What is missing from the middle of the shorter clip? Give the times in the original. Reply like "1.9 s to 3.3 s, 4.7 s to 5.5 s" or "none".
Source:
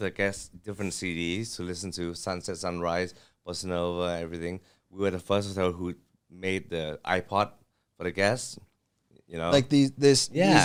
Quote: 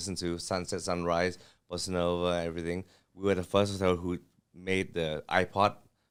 none